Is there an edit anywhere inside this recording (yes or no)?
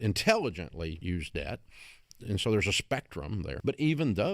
yes